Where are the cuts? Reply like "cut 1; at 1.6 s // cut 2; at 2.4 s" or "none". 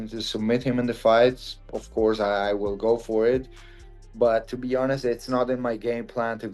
none